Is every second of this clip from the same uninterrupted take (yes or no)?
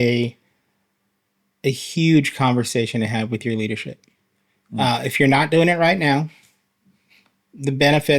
yes